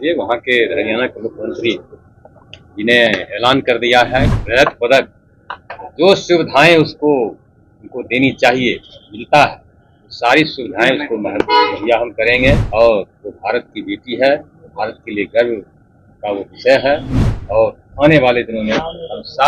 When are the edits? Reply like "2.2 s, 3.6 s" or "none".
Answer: 4.4 s, 12.6 s